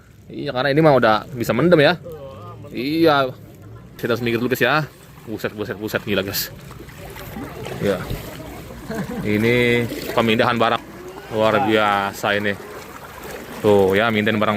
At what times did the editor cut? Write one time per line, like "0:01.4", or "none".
0:04.0
0:10.8